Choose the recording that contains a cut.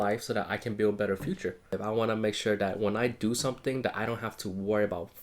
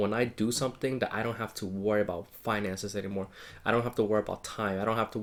first; 1 cut; at 1.8 s

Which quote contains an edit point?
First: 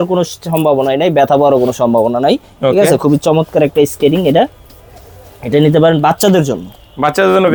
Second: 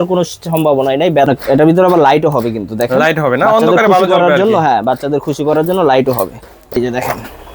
second; 2 cuts; at 1.3 s, 6.8 s

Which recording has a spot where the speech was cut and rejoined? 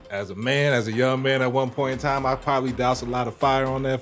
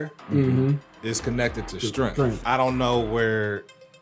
second; 2 cuts; at 1.0 s, 2.4 s

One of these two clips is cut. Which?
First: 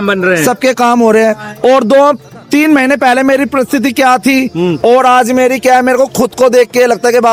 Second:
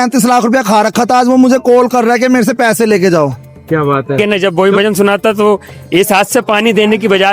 second; 1 cut; at 4.2 s

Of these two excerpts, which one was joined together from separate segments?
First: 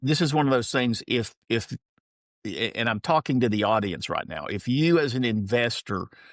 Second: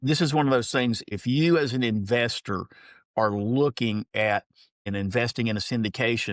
second; 2 cuts; at 1.0 s, 4.8 s

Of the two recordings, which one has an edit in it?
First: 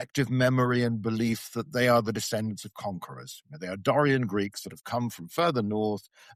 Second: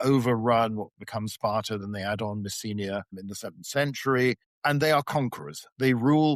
second; 2 cuts; at 3.2 s, 4.5 s

